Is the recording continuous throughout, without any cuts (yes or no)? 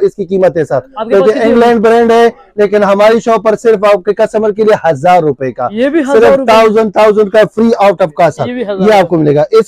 yes